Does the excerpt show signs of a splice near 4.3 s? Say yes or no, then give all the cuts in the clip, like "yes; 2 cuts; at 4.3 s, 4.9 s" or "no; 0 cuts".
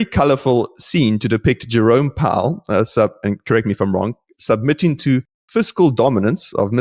no; 0 cuts